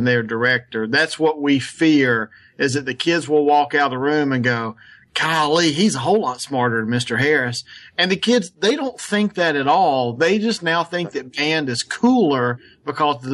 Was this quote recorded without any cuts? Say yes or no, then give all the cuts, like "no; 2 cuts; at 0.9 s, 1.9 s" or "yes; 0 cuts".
yes; 0 cuts